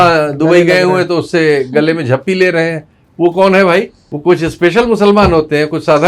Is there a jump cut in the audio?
yes; 1 cut; at 4.0 s

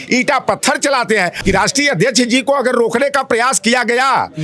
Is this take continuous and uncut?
no; 1 cut; at 1.3 s

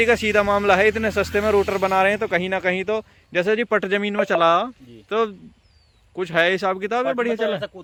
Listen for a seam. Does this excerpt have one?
no; 0 cuts

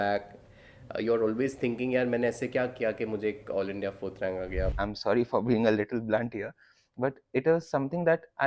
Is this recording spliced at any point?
yes; 1 cut; at 4.7 s

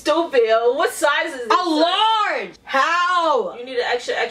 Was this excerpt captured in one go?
no; 1 cut; at 2.5 s

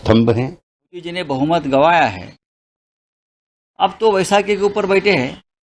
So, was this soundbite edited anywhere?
yes; 1 cut; at 1.1 s

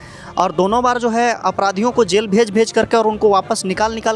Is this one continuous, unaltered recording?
yes; 0 cuts

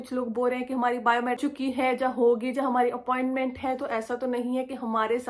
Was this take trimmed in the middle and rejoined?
yes; 1 cut; at 1.4 s

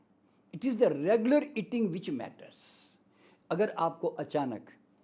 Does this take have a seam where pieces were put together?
yes; 1 cut; at 3.2 s

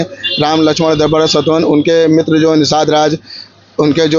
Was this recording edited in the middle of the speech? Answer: no; 0 cuts

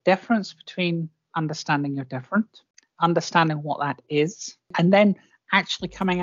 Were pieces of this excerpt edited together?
yes; 1 cut; at 4.7 s

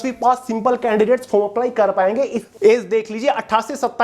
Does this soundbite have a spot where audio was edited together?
yes; 1 cut; at 2.4 s

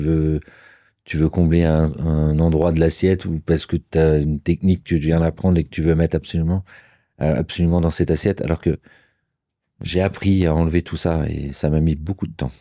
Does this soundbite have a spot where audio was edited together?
no; 0 cuts

